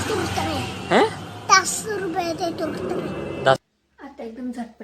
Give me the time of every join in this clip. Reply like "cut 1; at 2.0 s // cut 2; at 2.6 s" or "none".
cut 1; at 3.6 s